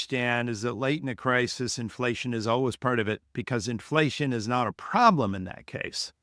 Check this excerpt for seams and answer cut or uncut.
uncut